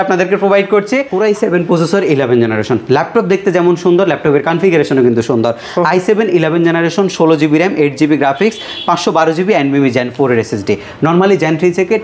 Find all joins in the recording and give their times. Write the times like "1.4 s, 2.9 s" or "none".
1.1 s